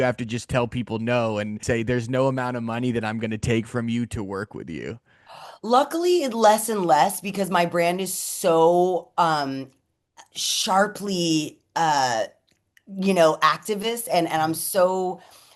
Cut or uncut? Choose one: cut